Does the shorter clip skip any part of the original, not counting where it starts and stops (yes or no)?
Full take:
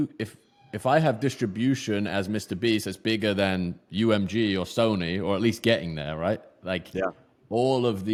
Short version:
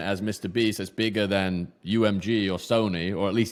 no